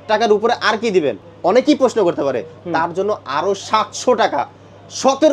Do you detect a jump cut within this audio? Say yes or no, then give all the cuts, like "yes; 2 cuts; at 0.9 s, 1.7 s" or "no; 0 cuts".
no; 0 cuts